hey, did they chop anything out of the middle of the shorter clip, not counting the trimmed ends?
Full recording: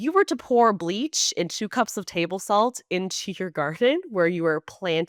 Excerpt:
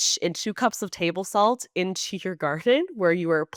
no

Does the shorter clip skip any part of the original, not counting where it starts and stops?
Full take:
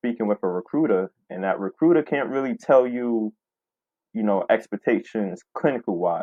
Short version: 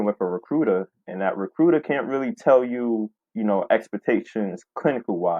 yes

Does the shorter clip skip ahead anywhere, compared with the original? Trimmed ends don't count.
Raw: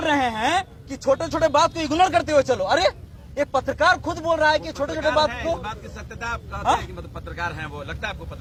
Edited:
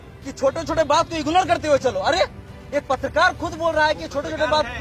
no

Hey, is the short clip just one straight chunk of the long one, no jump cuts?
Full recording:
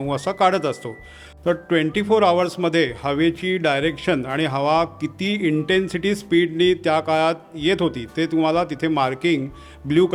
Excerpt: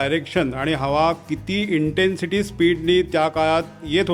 yes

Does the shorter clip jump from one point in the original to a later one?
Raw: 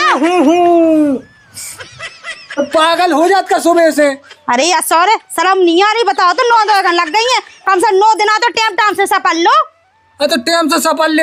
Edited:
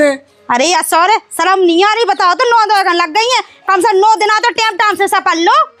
no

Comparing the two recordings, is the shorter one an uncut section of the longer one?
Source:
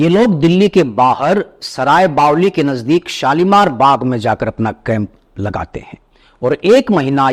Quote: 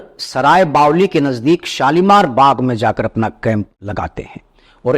no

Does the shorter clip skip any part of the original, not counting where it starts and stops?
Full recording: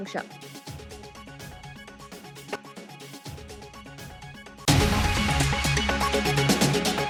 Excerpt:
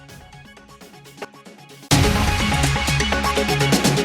yes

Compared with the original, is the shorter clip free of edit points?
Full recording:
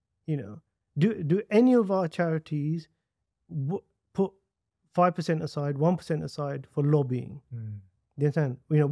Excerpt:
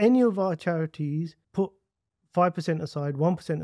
no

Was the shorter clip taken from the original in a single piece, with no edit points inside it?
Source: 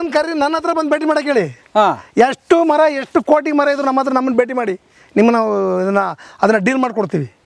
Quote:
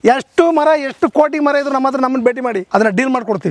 no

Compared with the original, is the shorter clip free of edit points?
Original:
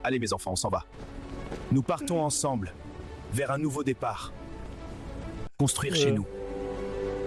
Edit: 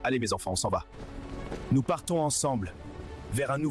yes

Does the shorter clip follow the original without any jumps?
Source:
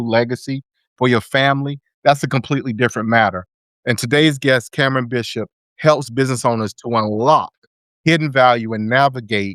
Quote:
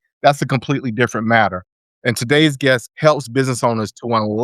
no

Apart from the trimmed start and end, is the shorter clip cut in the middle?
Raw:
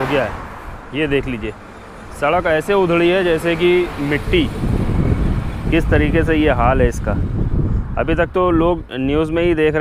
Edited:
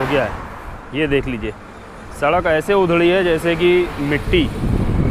no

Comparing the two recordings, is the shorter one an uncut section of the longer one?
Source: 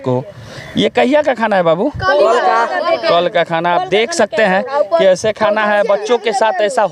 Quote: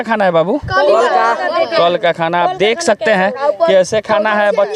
yes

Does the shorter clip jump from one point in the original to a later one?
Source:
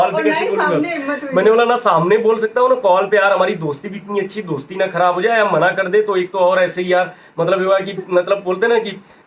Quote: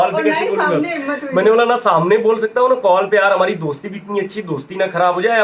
no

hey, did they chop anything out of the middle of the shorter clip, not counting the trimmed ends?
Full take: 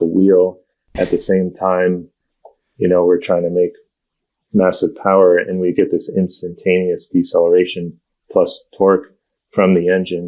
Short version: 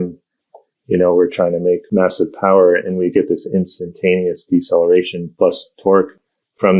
yes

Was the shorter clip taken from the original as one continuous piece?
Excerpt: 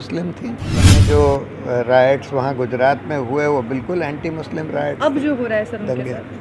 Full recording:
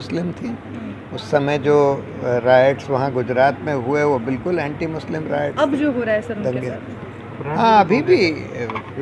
no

